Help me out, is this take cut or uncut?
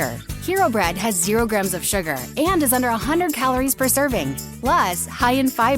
cut